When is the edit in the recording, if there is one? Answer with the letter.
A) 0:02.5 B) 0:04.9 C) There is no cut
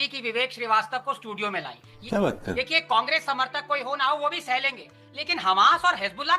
A